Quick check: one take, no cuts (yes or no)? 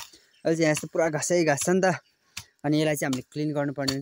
yes